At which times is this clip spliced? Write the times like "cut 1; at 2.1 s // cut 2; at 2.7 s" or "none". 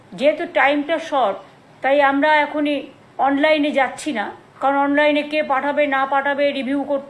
none

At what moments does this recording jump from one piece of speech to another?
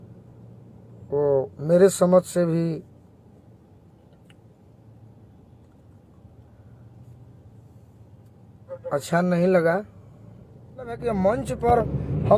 cut 1; at 11.0 s

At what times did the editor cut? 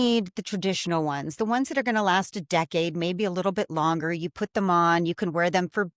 none

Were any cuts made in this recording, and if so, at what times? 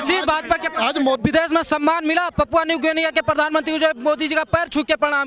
cut 1; at 1.2 s

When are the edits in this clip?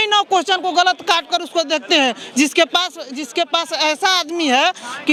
none

